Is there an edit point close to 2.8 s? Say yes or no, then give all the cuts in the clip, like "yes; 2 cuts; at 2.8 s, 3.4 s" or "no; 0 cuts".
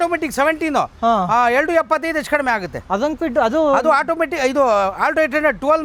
no; 0 cuts